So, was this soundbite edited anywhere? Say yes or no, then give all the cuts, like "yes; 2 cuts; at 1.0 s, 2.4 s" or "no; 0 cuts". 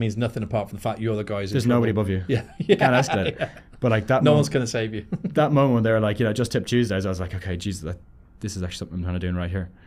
no; 0 cuts